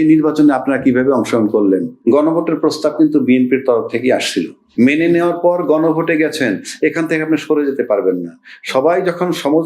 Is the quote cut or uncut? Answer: cut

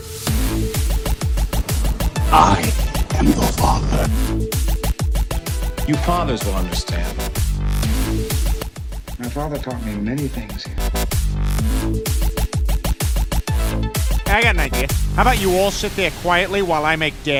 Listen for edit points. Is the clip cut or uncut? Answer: uncut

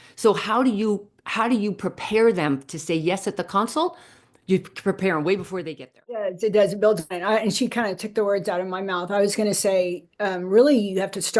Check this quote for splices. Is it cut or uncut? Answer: cut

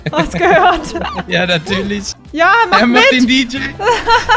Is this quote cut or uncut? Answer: cut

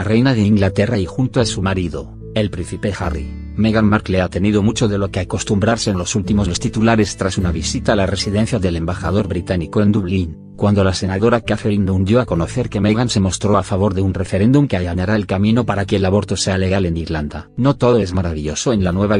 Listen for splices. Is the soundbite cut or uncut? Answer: uncut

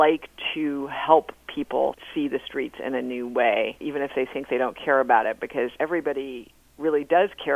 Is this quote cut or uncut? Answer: cut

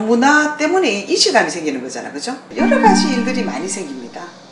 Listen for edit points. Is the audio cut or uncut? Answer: cut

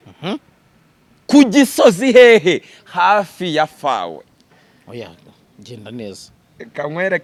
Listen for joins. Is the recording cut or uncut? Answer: uncut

